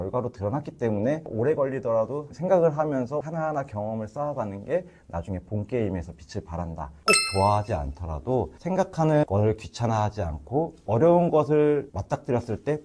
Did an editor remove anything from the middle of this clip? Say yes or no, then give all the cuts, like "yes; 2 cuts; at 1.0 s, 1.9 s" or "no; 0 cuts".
yes; 3 cuts; at 1.2 s, 6.9 s, 8.6 s